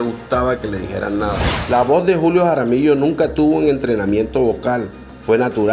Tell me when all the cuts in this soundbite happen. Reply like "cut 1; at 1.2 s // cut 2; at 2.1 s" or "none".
cut 1; at 1.5 s